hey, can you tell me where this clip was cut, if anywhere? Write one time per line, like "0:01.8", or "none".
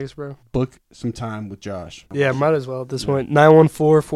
0:02.0